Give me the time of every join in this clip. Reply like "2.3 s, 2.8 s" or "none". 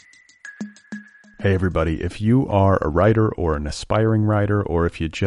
0.9 s